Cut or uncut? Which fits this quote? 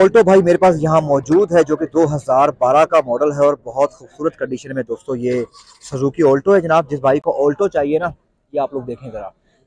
uncut